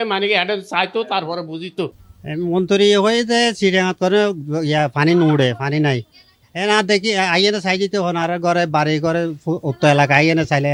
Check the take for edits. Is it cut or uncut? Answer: uncut